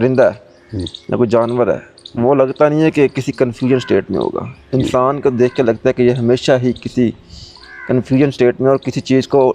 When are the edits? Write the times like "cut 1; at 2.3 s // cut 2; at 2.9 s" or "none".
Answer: none